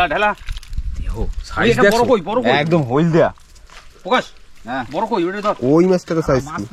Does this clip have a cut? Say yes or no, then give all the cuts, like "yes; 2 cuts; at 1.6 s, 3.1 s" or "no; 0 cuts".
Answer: no; 0 cuts